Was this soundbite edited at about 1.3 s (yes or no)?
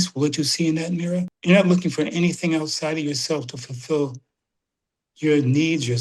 yes